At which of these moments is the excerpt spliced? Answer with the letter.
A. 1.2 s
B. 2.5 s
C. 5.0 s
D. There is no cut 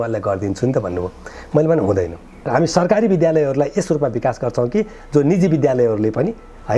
B